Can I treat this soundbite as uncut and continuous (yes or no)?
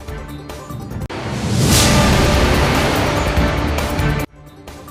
yes